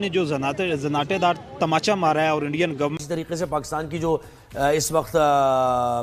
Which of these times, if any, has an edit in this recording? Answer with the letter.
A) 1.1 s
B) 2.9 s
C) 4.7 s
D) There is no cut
B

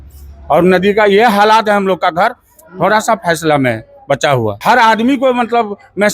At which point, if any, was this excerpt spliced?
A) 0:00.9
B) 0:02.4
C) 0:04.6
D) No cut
C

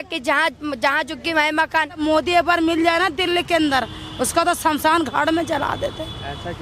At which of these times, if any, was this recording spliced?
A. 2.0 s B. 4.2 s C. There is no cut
A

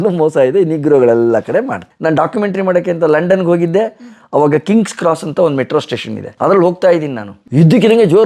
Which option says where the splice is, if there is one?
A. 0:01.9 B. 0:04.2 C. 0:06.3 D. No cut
A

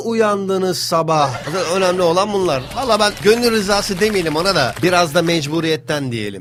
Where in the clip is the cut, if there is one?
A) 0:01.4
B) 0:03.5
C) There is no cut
C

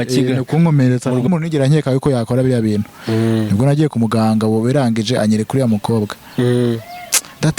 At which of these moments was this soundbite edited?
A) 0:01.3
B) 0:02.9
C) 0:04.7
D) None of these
A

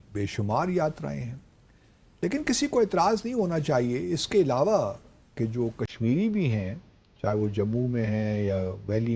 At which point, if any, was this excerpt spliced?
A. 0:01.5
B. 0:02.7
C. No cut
C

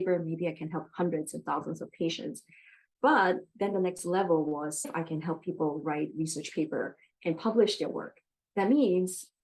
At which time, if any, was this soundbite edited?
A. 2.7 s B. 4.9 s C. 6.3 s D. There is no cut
B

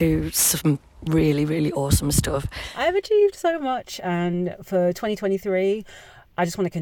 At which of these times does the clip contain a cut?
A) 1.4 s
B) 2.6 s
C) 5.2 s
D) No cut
B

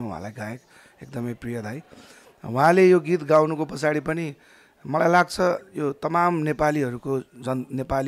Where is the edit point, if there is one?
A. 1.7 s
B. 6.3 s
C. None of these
C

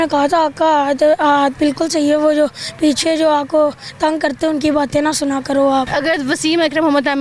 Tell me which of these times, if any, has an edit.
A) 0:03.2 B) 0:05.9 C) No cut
B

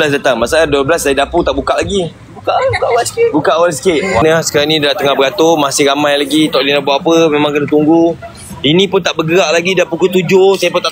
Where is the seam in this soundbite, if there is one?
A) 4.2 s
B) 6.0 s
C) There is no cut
A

